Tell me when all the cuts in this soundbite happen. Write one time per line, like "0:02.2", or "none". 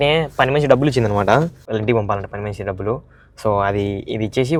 none